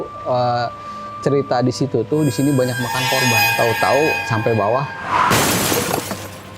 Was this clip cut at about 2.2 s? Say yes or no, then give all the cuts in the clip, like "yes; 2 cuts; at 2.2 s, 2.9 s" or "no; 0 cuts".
no; 1 cut; at 3.4 s